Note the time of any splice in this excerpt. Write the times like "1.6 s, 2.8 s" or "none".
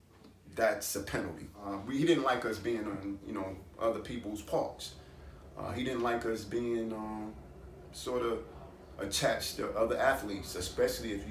1.5 s